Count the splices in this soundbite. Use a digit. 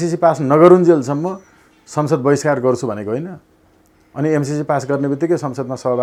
0